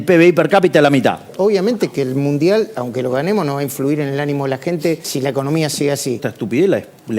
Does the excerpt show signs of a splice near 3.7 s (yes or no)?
no